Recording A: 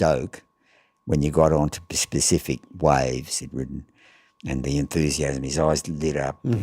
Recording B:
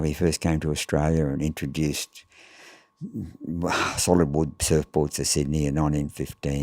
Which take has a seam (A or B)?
A